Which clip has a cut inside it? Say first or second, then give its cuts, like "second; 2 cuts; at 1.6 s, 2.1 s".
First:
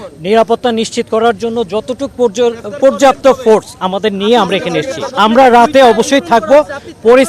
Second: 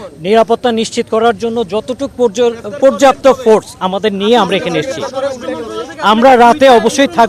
first; 1 cut; at 5.1 s